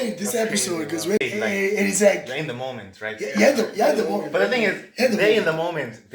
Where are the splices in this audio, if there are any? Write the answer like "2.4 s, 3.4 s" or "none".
1.2 s